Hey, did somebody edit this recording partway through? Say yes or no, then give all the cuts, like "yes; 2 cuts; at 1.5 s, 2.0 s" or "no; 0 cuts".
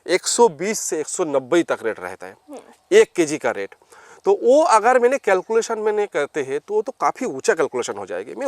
no; 0 cuts